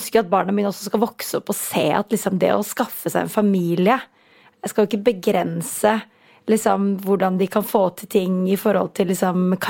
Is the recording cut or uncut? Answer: uncut